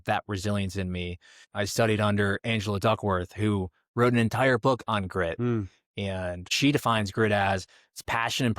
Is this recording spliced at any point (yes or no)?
yes